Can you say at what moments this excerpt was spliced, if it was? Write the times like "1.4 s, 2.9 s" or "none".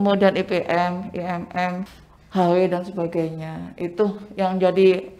1.9 s